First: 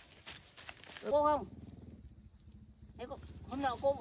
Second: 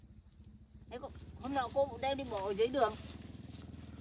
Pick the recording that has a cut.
first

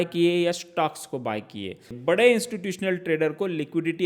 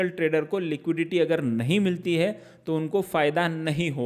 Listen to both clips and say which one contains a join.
first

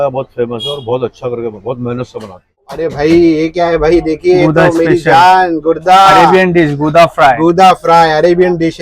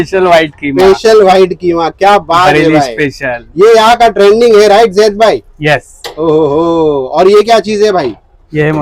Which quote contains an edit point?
first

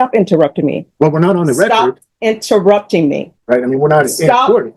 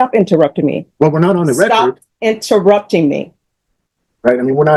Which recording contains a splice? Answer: first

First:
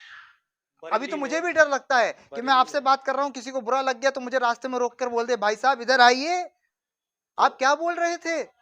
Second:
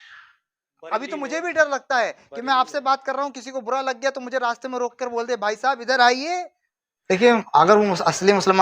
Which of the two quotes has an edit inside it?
second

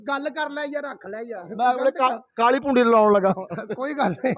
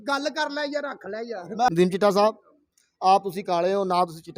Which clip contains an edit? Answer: second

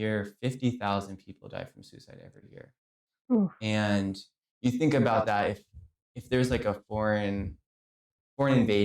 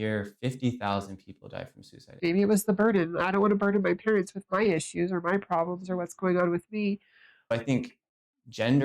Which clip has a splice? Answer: second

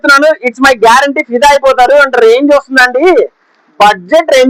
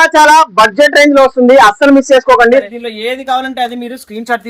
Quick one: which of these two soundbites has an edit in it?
second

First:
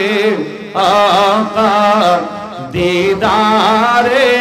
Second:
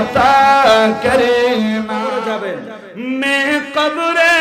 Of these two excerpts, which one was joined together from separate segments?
second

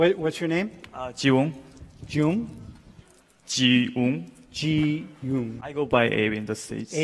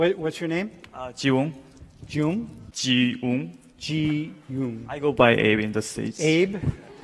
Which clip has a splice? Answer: second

